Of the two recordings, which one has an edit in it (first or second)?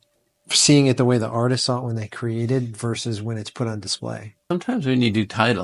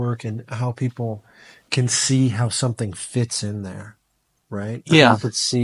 first